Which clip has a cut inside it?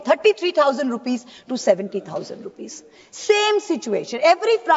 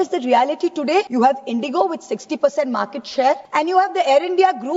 second; 2 cuts; at 1.1 s, 3.4 s

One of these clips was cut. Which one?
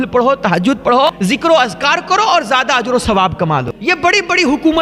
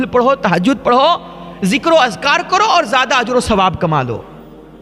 first; 2 cuts; at 1.1 s, 3.7 s

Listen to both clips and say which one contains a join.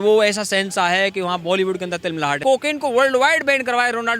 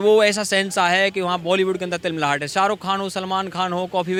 first; 1 cut; at 2.4 s

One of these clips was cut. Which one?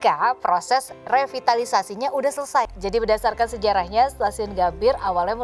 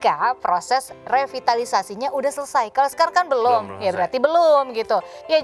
first; 1 cut; at 2.7 s

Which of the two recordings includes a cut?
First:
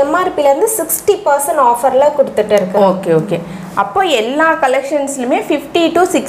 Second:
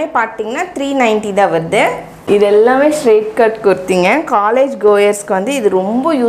second; 1 cut; at 2.1 s

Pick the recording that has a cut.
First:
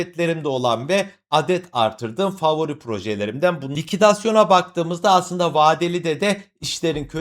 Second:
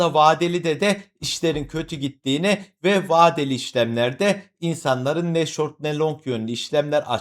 first; 1 cut; at 3.7 s

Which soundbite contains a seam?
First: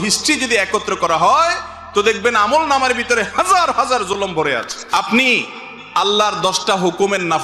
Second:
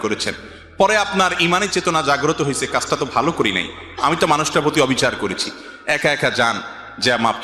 first; 1 cut; at 4.8 s

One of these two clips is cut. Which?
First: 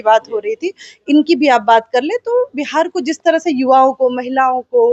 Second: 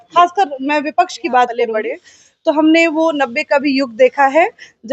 second; 1 cut; at 1.7 s

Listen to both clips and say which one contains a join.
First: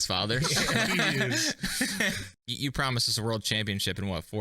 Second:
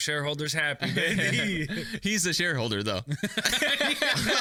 first; 1 cut; at 2.3 s

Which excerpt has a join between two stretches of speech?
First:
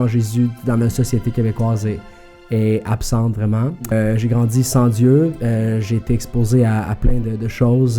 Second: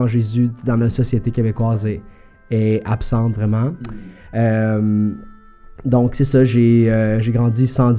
first; 1 cut; at 3.9 s

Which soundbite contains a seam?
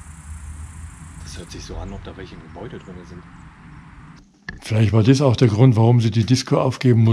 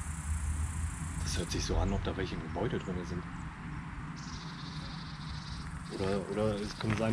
first; 1 cut; at 4.2 s

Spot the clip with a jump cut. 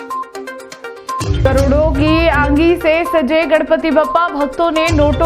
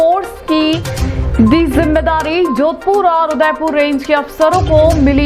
first; 1 cut; at 1.2 s

